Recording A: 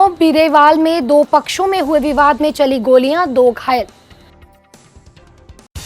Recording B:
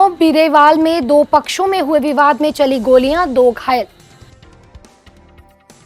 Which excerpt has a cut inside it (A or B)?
A